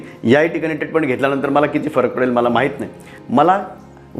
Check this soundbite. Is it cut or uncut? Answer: cut